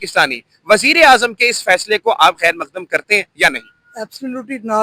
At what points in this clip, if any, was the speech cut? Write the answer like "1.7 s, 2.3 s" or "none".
none